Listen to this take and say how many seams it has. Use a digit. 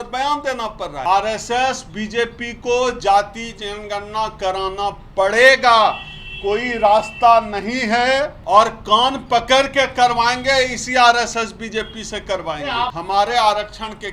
3